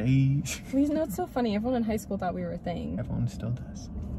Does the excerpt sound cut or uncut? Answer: uncut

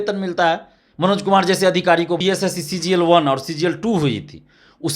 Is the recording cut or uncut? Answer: cut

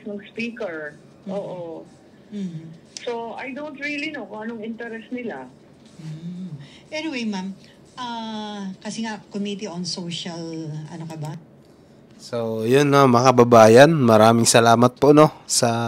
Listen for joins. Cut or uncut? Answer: uncut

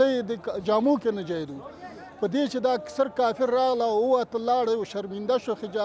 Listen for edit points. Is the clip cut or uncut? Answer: uncut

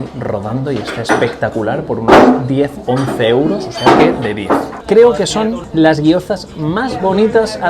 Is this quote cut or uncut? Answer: cut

